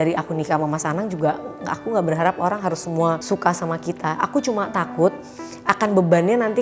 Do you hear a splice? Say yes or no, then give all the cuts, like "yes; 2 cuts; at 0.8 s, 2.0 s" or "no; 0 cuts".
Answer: no; 0 cuts